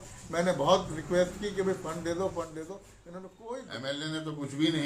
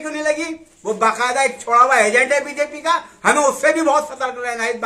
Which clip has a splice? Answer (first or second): first